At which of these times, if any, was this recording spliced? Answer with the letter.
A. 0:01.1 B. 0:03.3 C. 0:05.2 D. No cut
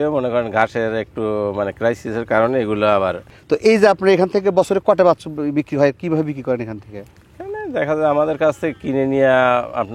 B